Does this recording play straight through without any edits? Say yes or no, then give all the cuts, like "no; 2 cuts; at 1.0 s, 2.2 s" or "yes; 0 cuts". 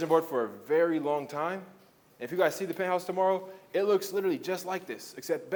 yes; 0 cuts